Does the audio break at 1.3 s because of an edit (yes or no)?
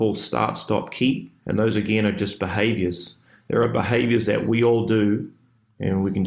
yes